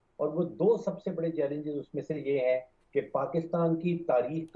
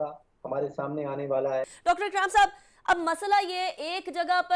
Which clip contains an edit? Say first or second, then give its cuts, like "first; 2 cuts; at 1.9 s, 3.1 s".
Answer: second; 1 cut; at 1.8 s